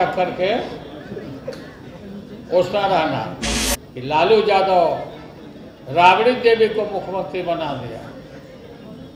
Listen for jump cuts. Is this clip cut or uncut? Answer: cut